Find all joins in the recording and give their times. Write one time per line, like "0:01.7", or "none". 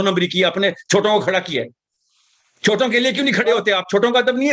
none